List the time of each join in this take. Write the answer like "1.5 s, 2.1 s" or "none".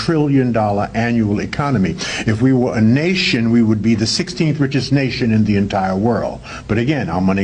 6.1 s

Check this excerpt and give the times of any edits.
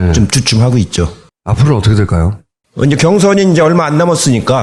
none

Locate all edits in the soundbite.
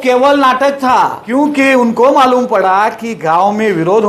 1.2 s

